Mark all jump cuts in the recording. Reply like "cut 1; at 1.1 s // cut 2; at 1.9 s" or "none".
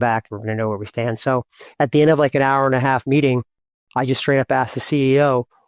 none